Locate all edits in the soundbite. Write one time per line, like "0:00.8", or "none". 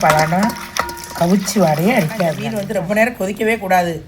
0:02.4